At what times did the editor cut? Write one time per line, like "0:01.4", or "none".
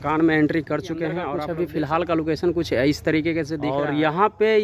0:01.3
0:03.6